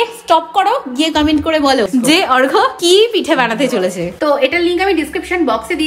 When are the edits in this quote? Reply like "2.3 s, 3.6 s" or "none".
4.1 s